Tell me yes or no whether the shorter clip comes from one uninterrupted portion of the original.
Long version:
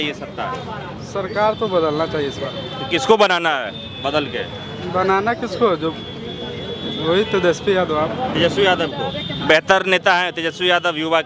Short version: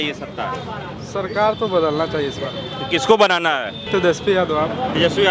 no